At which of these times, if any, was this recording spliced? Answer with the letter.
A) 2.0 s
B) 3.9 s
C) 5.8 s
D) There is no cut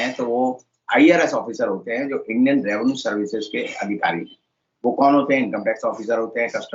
D